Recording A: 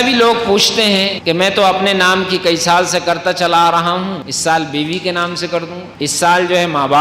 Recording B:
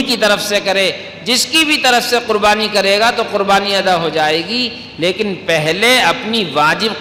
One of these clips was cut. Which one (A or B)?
A